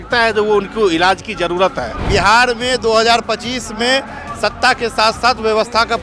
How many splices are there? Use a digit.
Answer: 1